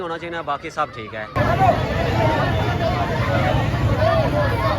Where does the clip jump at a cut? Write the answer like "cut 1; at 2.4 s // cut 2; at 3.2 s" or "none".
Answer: cut 1; at 1.4 s